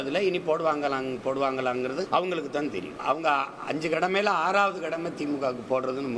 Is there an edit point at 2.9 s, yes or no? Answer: yes